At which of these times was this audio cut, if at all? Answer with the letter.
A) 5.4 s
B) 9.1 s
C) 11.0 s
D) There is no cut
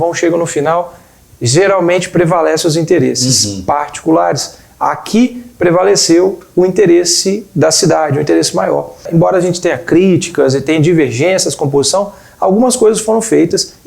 B